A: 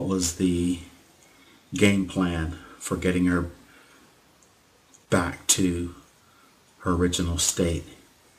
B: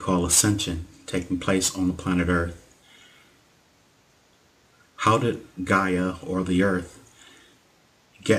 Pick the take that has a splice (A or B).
B